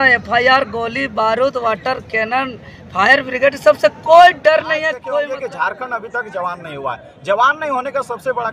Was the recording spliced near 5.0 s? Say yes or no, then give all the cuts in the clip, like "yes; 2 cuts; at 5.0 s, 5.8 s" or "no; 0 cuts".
yes; 1 cut; at 5.0 s